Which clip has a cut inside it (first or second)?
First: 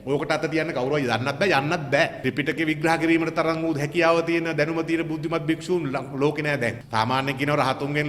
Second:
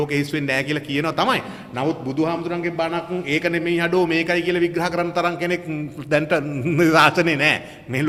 first